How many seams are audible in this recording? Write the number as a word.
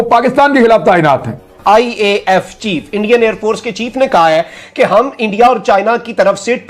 one